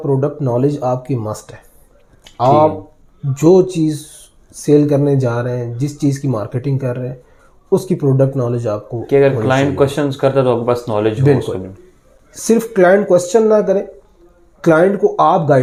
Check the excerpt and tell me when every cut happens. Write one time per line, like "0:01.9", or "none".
none